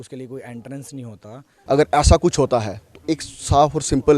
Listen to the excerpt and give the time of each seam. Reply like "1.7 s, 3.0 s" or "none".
1.5 s